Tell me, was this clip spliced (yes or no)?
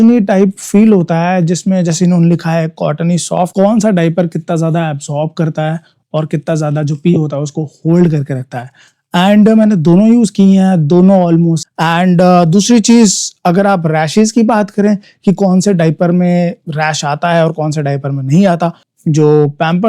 yes